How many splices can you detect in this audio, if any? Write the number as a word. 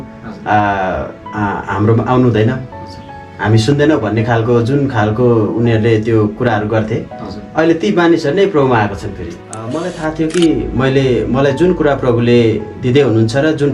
one